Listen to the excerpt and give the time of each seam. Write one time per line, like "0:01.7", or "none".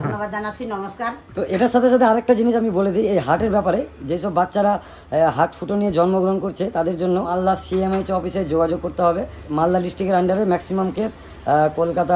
0:01.2
0:07.3
0:09.4